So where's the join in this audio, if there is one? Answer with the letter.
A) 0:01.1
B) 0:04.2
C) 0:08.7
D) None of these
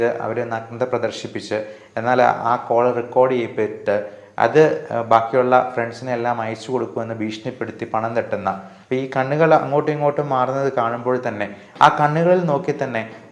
C